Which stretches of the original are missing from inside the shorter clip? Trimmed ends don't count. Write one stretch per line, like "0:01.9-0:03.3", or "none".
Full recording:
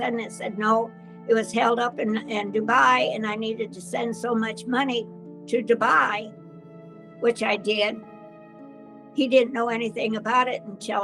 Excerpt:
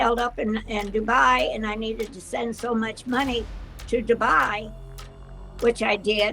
none